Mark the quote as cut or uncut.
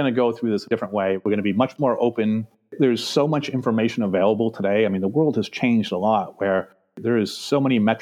cut